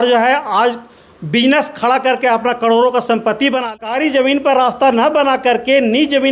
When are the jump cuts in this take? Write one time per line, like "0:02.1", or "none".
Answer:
0:03.8